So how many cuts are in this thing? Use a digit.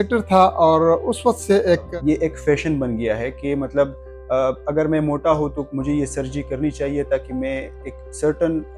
1